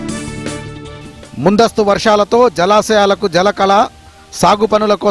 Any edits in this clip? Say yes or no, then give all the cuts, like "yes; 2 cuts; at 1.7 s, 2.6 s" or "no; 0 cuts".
no; 0 cuts